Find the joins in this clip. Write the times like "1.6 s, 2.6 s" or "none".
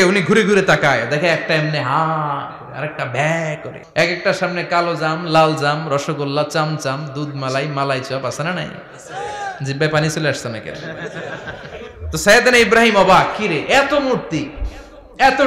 3.7 s